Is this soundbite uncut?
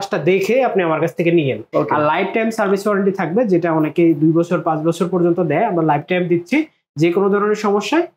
no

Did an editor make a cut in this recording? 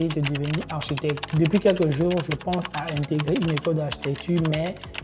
yes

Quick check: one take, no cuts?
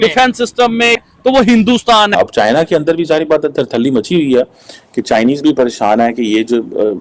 no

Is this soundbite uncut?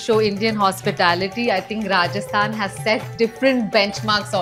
yes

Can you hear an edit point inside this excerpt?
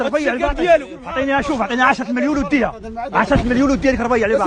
no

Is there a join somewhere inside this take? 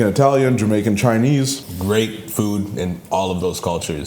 yes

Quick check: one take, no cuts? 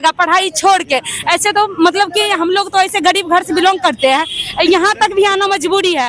yes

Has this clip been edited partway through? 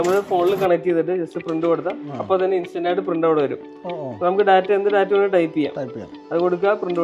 no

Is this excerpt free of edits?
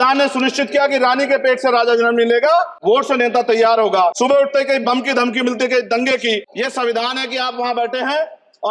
no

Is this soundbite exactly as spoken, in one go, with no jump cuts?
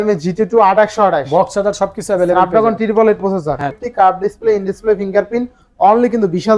no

